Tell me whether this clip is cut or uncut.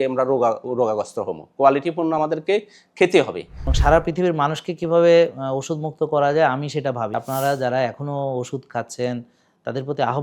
cut